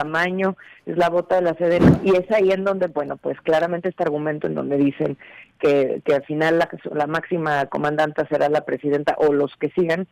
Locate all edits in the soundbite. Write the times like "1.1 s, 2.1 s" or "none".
1.9 s